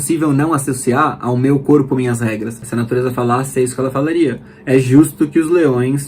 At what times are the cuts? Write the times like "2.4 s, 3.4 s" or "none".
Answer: 2.6 s